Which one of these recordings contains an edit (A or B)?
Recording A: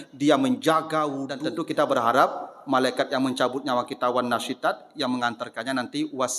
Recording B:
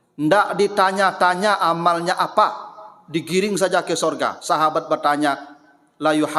A